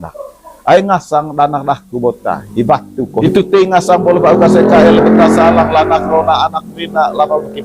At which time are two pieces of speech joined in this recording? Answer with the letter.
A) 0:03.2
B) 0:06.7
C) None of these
A